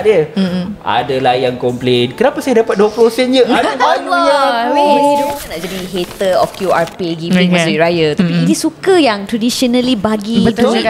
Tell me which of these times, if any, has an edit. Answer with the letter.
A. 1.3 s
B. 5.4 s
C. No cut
B